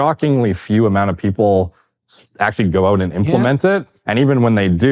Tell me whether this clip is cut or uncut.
uncut